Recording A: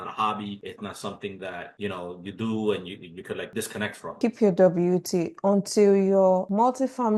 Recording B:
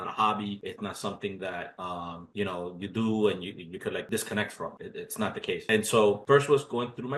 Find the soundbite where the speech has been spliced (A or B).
A